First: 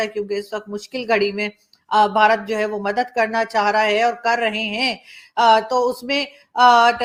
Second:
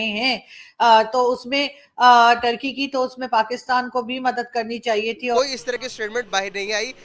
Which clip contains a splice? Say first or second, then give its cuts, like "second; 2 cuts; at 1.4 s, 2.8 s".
second; 1 cut; at 5.4 s